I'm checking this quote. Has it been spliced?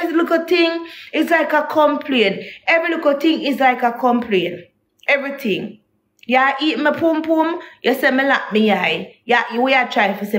no; 0 cuts

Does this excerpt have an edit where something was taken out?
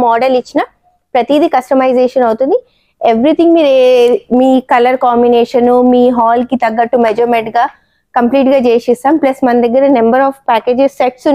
no; 0 cuts

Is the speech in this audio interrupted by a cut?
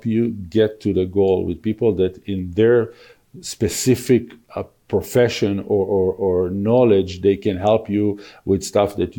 no; 0 cuts

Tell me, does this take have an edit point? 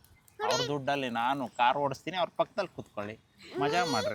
no; 0 cuts

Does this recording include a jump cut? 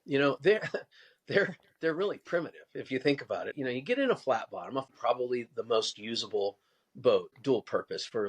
yes; 3 cuts; at 3.5 s, 4.9 s, 7.3 s

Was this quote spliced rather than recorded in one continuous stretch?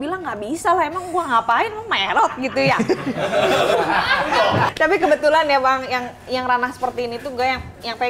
yes; 1 cut; at 4.7 s

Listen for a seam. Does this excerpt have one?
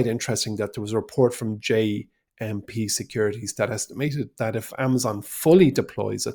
no; 0 cuts

